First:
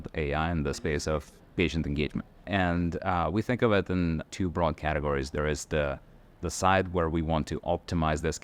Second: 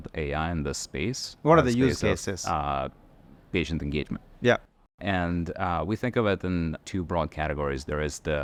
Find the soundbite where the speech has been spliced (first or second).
first